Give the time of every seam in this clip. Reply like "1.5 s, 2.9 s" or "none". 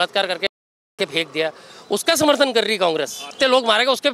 3.2 s